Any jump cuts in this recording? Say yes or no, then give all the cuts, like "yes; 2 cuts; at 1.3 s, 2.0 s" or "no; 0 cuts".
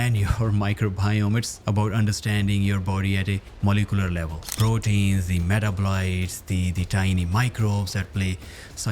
yes; 1 cut; at 4.5 s